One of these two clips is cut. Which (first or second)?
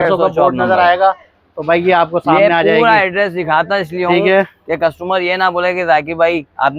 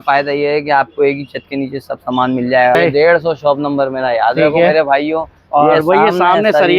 second